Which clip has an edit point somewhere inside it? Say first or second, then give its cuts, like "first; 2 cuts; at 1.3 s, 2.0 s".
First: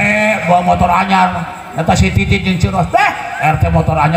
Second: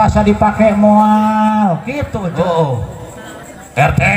second; 1 cut; at 2.0 s